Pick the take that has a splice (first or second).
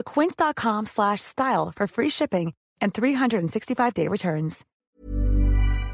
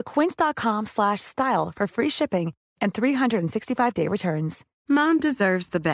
first